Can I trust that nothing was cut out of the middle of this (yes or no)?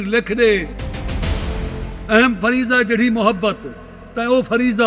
no